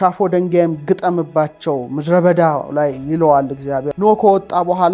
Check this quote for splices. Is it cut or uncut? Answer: cut